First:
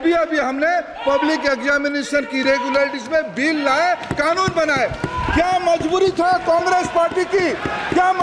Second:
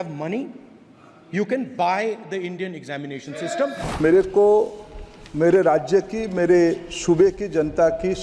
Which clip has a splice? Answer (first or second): second